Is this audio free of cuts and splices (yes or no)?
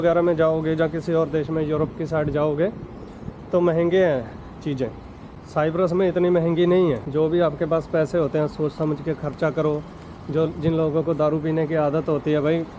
yes